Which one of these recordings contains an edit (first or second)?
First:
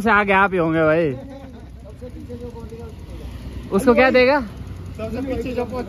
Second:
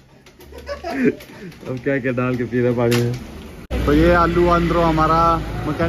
second